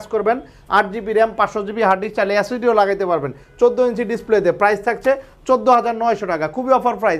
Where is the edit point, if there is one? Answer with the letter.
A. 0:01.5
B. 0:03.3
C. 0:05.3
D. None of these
D